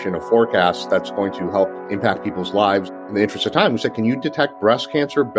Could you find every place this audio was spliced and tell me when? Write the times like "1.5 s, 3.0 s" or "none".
1.8 s, 3.0 s

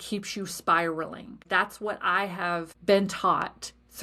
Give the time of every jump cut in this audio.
1.5 s, 2.7 s

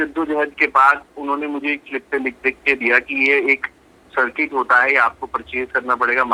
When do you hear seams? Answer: none

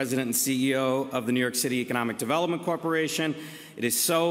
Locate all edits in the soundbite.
none

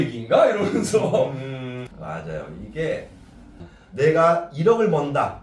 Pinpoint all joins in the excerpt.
1.9 s

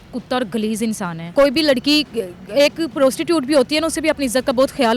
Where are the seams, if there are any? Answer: 1.2 s

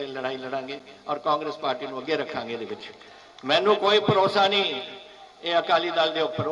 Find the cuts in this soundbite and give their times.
none

